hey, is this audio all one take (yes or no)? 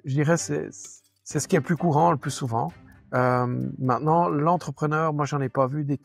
yes